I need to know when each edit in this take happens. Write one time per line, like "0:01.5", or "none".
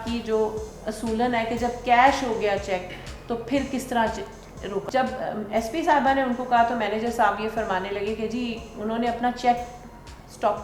0:04.8

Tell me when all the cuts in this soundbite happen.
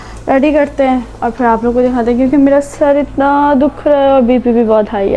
none

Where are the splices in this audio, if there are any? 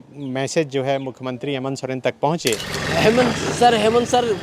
0:02.7

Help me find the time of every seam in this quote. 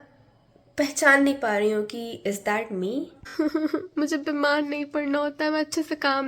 0:03.2

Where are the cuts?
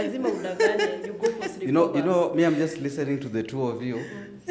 none

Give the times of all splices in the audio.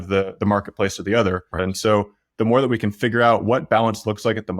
0:01.6

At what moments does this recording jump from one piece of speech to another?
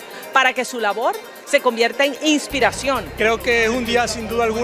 0:03.1

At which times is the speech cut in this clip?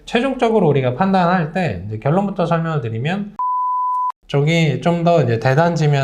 0:03.6

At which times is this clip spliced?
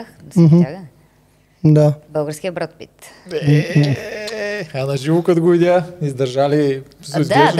none

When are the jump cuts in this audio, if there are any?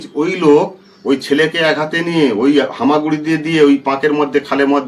none

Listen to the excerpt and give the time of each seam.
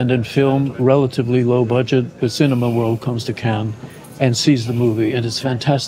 0:02.1

